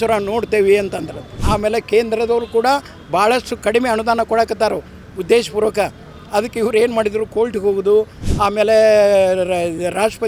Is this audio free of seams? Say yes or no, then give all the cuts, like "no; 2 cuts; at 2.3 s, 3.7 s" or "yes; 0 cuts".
no; 1 cut; at 1.4 s